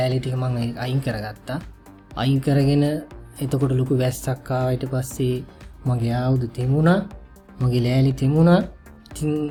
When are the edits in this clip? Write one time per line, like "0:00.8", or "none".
none